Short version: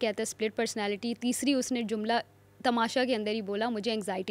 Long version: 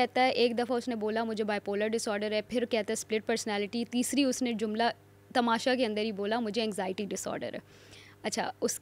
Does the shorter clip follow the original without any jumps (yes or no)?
yes